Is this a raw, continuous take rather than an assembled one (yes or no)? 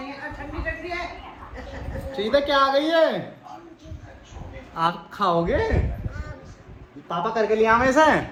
yes